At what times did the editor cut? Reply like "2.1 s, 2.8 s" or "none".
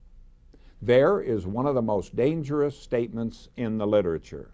2.6 s